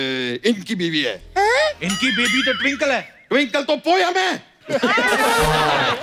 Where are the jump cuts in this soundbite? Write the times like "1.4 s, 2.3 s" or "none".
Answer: none